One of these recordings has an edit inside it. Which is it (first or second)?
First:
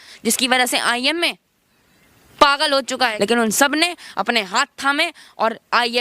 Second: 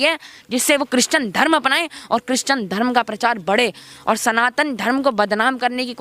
first